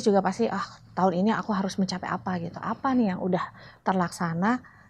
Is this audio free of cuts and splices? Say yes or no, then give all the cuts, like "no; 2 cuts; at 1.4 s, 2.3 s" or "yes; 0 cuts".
yes; 0 cuts